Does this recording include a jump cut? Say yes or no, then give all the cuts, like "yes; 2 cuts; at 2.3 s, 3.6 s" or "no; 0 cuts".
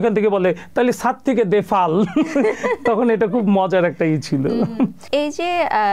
no; 0 cuts